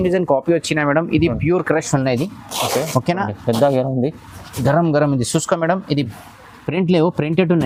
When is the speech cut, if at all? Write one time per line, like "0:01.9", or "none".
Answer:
none